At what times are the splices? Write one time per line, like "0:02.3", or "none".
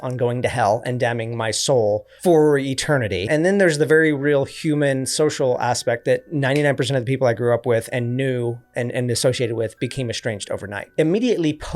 0:02.1
0:03.2
0:10.8